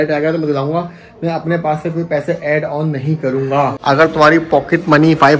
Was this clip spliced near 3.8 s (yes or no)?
yes